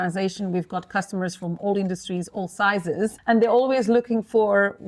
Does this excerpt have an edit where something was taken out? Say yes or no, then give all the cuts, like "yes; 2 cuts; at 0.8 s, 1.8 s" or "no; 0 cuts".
yes; 1 cut; at 3.2 s